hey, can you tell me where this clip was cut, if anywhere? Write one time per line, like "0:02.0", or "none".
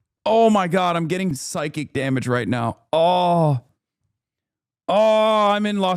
0:01.4